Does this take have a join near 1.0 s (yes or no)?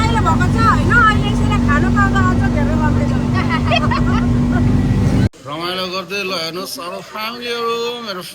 no